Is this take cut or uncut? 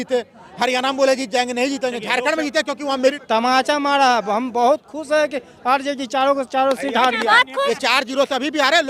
cut